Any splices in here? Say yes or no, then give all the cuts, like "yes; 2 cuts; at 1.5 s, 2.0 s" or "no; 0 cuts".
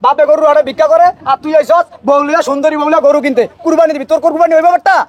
no; 0 cuts